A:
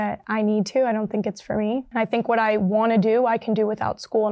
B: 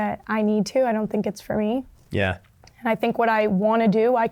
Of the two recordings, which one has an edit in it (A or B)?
A